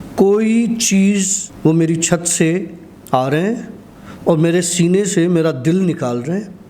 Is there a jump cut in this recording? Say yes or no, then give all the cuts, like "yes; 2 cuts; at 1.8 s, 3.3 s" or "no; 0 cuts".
yes; 1 cut; at 1.4 s